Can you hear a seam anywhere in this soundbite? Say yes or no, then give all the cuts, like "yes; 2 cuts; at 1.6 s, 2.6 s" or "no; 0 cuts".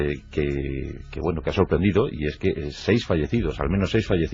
no; 0 cuts